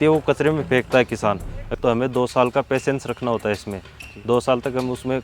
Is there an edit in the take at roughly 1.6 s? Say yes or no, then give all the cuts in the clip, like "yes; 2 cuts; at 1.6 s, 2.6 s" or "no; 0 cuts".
yes; 1 cut; at 1.6 s